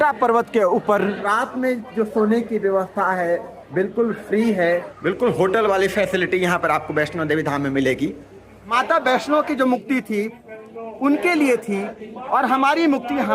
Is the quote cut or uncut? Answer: cut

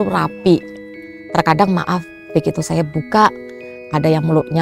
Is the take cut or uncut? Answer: uncut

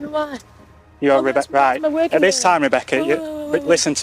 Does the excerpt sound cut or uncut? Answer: uncut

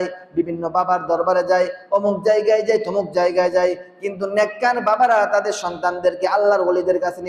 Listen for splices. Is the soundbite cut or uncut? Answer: uncut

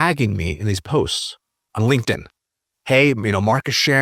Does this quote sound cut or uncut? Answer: cut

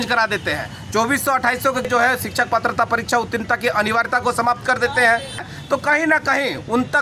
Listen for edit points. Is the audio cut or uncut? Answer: cut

